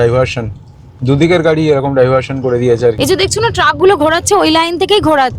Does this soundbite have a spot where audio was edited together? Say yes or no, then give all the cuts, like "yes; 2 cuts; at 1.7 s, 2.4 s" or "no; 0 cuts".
yes; 1 cut; at 3.0 s